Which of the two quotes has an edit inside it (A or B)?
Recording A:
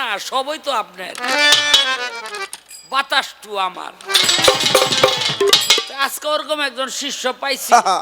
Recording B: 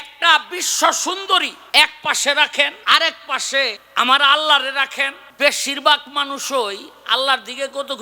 B